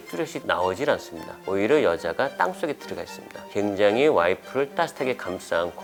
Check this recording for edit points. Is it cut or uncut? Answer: uncut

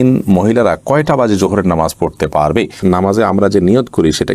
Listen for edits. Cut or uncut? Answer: cut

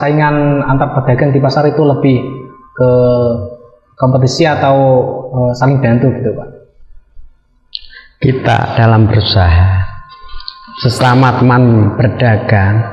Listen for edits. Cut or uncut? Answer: uncut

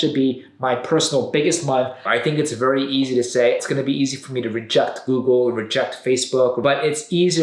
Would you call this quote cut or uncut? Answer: cut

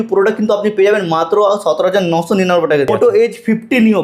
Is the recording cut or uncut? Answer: cut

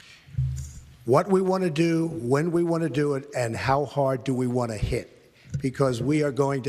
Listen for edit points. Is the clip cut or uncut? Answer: uncut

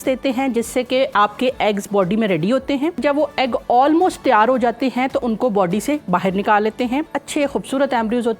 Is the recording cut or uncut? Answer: cut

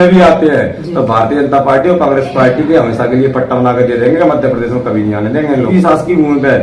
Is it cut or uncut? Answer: cut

